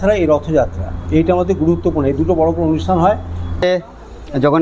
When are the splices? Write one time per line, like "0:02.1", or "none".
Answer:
0:03.6